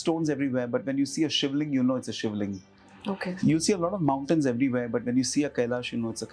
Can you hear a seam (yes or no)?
no